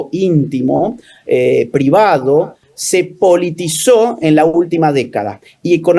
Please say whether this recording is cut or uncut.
uncut